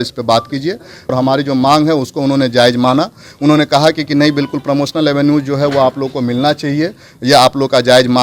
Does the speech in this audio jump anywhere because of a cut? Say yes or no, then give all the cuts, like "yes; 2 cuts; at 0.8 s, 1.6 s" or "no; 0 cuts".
yes; 1 cut; at 1.1 s